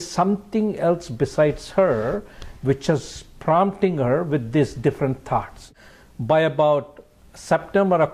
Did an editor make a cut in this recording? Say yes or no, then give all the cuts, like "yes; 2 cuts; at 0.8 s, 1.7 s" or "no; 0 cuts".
yes; 1 cut; at 5.6 s